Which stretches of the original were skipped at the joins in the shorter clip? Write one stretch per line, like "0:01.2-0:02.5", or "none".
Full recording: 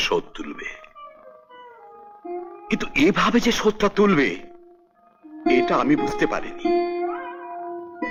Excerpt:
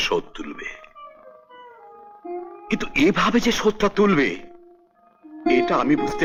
none